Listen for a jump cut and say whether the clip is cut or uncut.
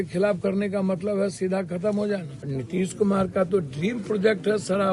cut